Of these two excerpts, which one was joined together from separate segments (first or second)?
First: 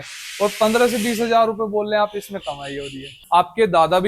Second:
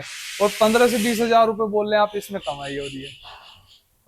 first